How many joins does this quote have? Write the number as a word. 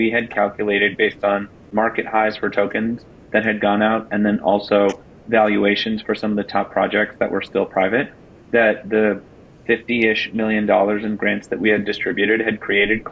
one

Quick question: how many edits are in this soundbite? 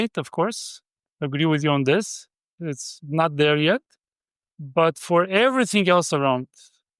one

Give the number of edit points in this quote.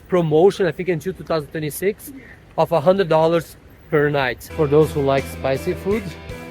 one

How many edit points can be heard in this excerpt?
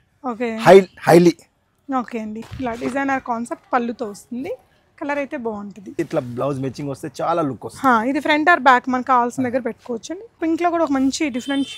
three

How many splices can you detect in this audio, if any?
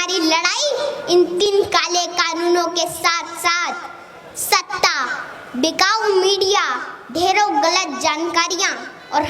one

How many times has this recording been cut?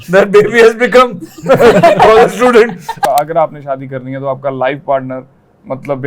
one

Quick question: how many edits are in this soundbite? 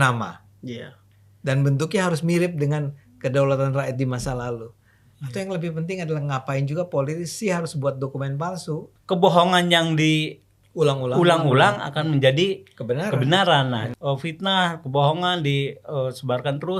two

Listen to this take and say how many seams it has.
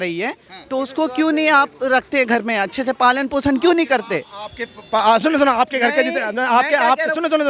zero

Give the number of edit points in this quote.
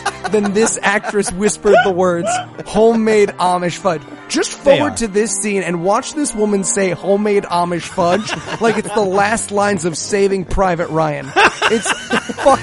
one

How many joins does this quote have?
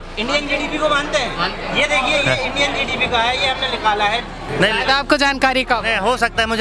one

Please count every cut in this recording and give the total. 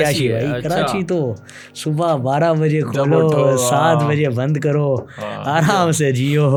zero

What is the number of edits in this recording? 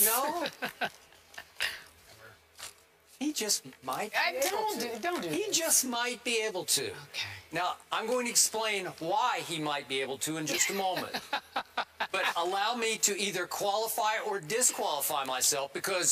zero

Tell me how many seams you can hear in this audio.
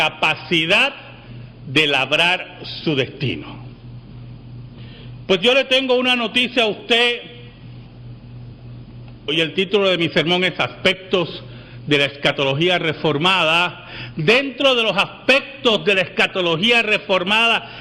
one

